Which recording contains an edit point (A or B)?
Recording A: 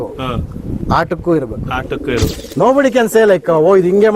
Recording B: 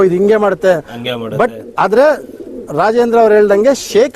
A